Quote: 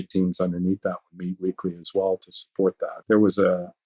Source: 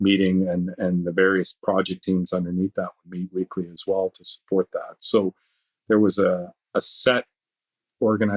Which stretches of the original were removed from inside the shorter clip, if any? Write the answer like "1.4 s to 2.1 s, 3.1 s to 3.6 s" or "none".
4.8 s to 5.7 s